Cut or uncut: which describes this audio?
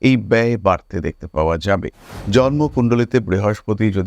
cut